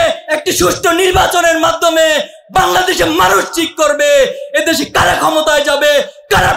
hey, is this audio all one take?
yes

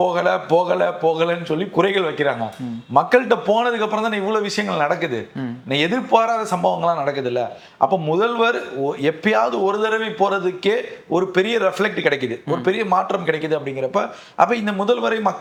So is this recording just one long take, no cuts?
yes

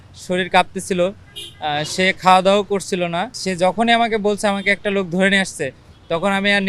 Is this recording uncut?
no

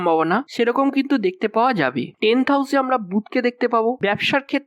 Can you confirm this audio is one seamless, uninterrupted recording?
no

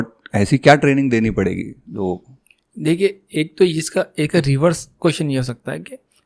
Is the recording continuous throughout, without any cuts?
yes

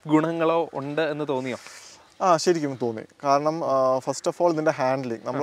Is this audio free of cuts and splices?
yes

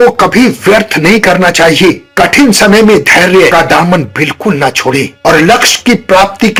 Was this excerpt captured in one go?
yes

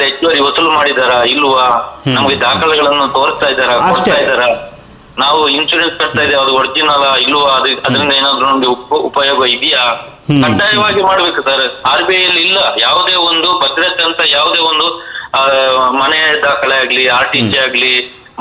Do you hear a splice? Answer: no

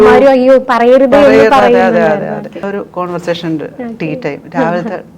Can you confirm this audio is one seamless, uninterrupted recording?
yes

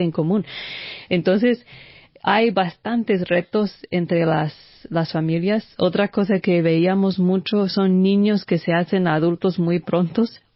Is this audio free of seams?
yes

